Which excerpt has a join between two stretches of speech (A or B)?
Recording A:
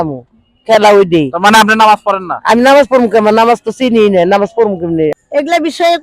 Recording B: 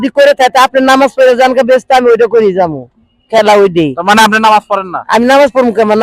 A